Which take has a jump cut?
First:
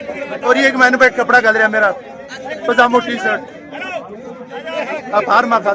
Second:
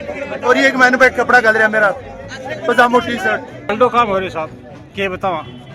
second; 1 cut; at 3.5 s

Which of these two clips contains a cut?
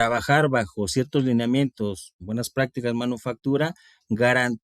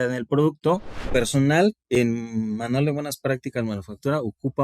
second; 1 cut; at 1.1 s

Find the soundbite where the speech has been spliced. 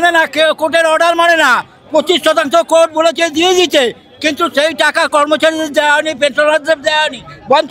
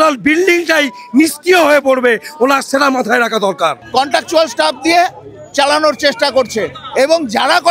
second; 1 cut; at 3.8 s

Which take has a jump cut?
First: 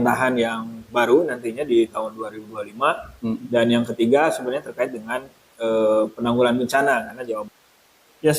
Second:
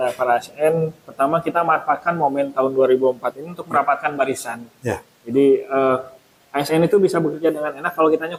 first; 1 cut; at 7.3 s

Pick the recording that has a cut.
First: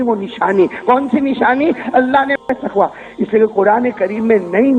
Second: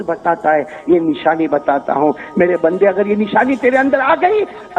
first; 1 cut; at 2.4 s

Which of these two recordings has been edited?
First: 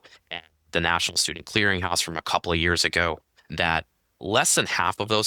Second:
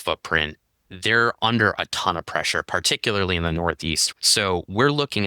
second; 1 cut; at 4.1 s

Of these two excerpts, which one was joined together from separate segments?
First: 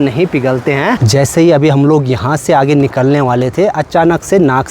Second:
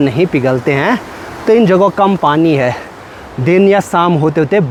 first; 1 cut; at 1.0 s

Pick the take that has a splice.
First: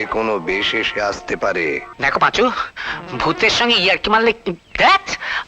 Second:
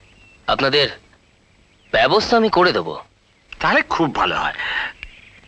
first; 1 cut; at 1.9 s

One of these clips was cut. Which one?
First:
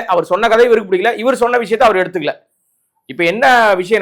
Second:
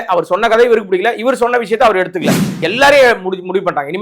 second; 1 cut; at 2.6 s

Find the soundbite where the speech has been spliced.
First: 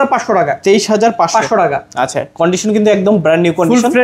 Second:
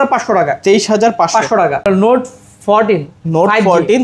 second; 1 cut; at 1.9 s

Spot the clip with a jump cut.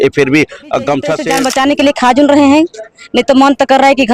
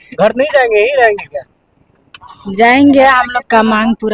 first; 1 cut; at 1.3 s

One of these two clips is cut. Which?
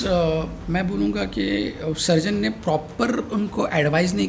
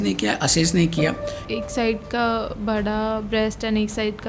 second; 1 cut; at 1.3 s

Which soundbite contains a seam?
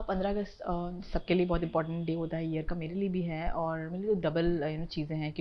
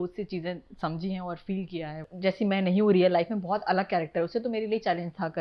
second; 1 cut; at 2.0 s

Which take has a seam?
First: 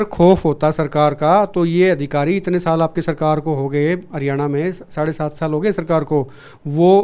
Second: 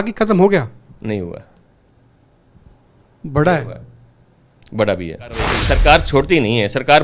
second; 1 cut; at 5.6 s

